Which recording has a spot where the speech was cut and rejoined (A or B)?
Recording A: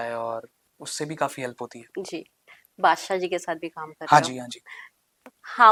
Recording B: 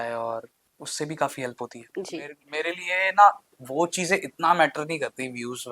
B